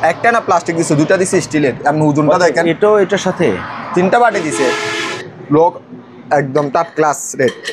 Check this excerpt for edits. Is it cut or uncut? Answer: cut